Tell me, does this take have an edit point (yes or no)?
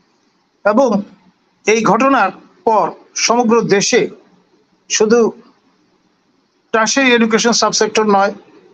no